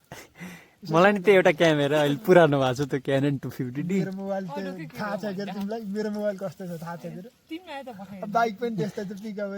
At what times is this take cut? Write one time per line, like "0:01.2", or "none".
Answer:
none